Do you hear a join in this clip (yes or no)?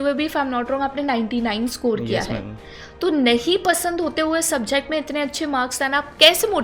no